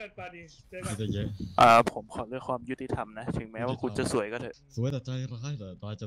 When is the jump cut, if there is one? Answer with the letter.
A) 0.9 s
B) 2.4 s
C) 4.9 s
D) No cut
C